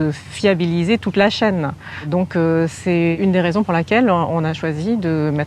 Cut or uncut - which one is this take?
uncut